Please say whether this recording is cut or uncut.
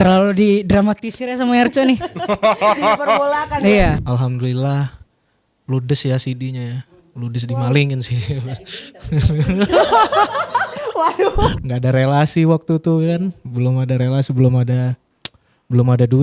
cut